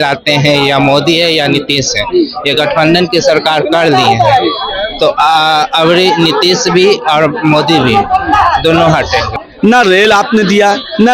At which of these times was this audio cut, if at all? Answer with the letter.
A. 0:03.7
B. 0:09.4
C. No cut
B